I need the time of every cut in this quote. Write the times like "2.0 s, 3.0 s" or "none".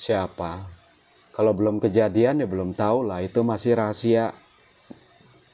none